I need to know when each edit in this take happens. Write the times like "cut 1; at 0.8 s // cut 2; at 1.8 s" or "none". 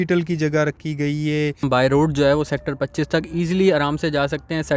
cut 1; at 1.7 s